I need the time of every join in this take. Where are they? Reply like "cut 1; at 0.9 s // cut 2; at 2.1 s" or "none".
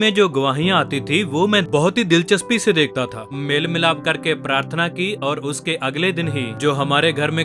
cut 1; at 1.6 s // cut 2; at 3.3 s // cut 3; at 6.5 s